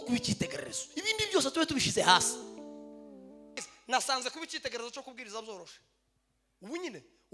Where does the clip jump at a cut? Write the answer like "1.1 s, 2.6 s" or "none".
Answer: 3.5 s

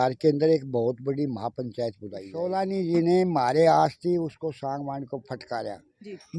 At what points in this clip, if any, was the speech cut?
2.3 s

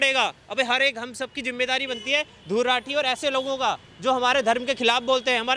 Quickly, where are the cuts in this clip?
none

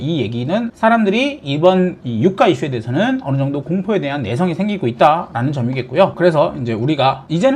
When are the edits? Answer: none

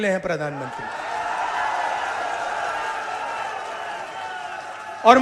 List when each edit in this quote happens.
none

